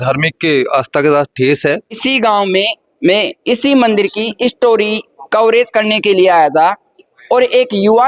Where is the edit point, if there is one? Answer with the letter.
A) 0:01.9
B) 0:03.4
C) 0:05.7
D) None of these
A